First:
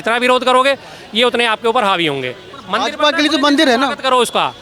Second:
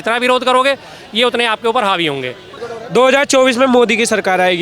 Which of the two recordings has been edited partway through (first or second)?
second